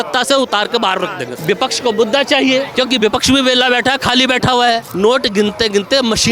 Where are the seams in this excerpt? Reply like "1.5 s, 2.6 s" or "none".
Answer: 1.3 s, 2.7 s, 4.9 s